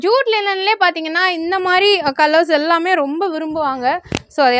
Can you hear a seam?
no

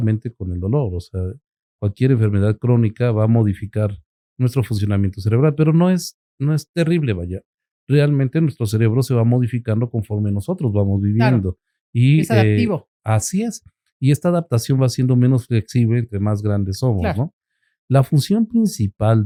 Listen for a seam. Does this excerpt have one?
no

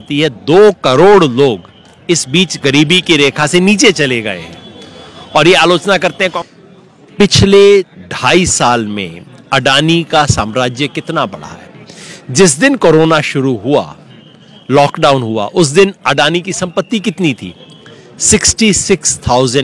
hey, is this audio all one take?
no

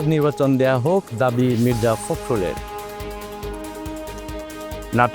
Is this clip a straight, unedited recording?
no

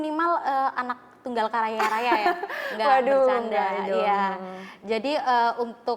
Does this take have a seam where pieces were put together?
no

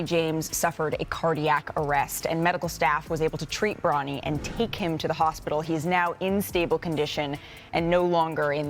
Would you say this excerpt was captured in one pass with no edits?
yes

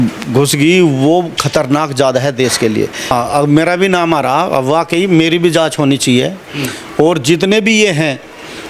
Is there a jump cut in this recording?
yes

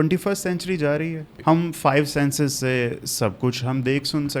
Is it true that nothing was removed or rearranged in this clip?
no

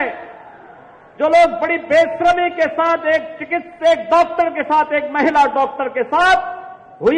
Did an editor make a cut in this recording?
no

